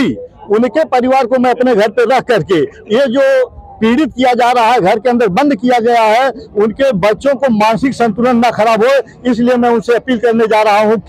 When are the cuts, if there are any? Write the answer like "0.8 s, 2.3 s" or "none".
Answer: none